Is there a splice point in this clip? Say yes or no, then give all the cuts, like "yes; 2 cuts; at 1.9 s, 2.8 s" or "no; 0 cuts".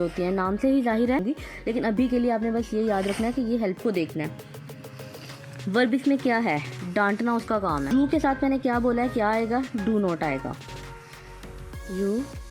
yes; 3 cuts; at 1.2 s, 3.8 s, 7.9 s